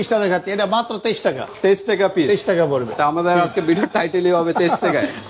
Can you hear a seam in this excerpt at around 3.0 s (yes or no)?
no